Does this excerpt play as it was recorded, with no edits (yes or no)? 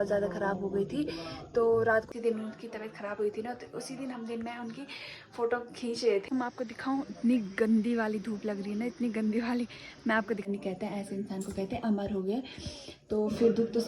no